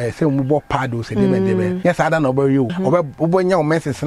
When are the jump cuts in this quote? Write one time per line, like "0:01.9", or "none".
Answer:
0:01.8
0:02.7